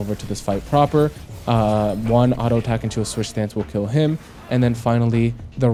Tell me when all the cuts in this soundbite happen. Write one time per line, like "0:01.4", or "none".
none